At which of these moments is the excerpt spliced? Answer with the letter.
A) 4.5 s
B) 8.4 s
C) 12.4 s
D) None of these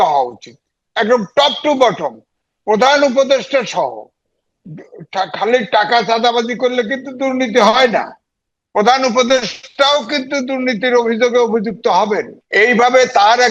C